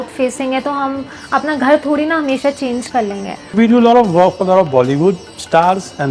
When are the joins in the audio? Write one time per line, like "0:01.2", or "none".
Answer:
0:03.4